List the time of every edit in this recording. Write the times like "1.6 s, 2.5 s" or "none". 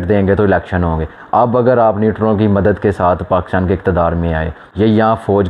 4.6 s